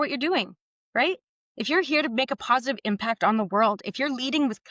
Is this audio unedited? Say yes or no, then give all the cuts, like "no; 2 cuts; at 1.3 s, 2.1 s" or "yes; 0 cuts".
yes; 0 cuts